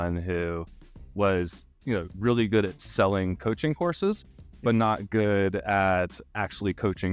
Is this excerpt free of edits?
yes; 0 cuts

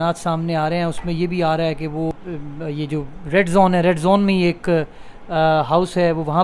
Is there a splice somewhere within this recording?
yes; 1 cut; at 2.1 s

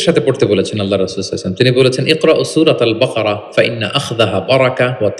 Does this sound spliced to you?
no; 0 cuts

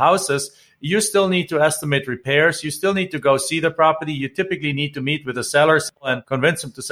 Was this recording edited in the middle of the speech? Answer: yes; 1 cut; at 6.0 s

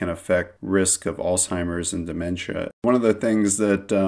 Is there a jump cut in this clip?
yes; 1 cut; at 2.8 s

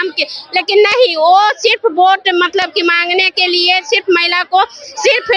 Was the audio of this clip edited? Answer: no; 0 cuts

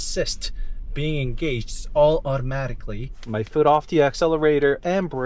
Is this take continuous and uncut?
no; 1 cut; at 3.1 s

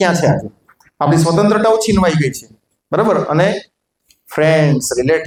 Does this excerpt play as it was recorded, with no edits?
yes; 0 cuts

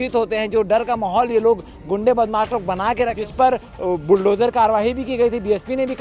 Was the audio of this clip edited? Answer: yes; 1 cut; at 3.2 s

